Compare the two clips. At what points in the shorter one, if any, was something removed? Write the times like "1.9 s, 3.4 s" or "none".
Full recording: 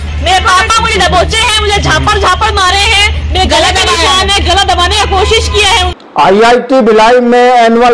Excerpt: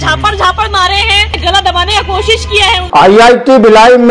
1.3 s, 2.8 s